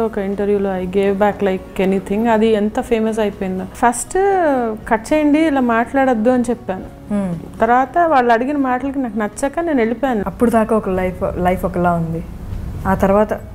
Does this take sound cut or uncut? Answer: cut